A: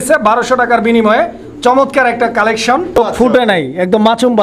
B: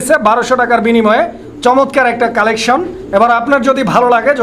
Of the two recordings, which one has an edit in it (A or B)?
A